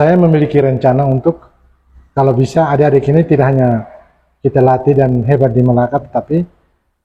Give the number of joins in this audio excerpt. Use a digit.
0